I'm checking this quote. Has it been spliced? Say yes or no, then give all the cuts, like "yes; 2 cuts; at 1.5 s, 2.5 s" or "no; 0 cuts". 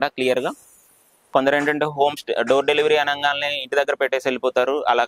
yes; 1 cut; at 1.2 s